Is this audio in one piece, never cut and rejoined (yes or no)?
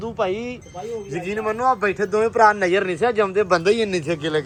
yes